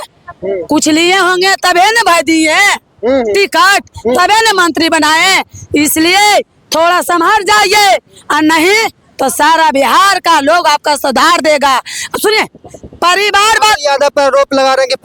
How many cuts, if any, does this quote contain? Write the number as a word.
one